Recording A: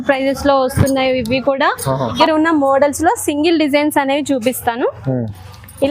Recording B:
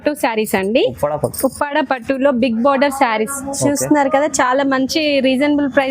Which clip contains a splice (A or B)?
A